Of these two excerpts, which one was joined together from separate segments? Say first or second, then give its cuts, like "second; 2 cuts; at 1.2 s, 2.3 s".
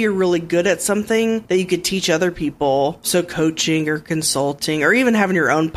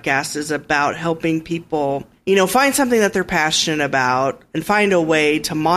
second; 1 cut; at 2.1 s